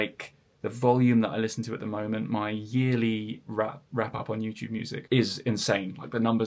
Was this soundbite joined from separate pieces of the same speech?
yes; 1 cut; at 5.0 s

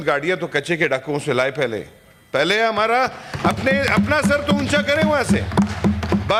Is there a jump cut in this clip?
no; 0 cuts

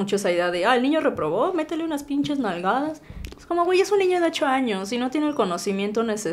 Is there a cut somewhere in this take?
no; 0 cuts

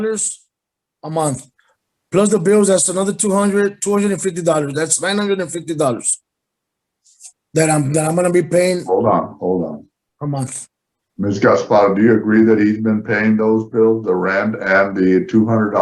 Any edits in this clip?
no; 0 cuts

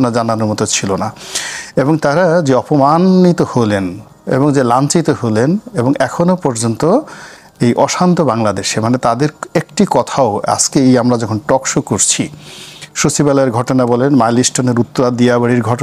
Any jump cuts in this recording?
no; 0 cuts

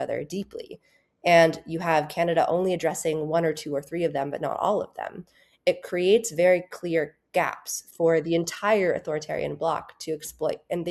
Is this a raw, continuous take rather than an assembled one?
yes; 0 cuts

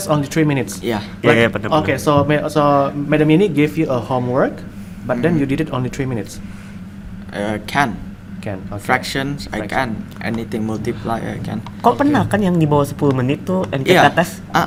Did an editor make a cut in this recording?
no; 0 cuts

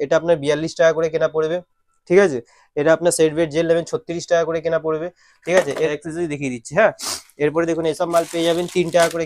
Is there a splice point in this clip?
no; 0 cuts

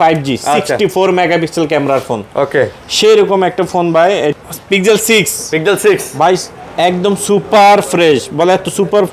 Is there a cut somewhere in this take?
yes; 1 cut; at 4.3 s

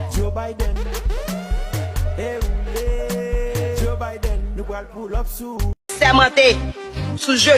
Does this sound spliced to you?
no; 0 cuts

